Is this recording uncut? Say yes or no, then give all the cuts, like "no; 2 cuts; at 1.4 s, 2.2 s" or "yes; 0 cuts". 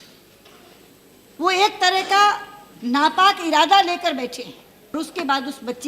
no; 1 cut; at 4.9 s